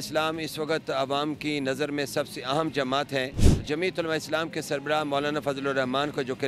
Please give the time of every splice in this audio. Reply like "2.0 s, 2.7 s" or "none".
3.5 s